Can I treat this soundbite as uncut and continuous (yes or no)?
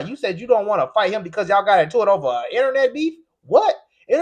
yes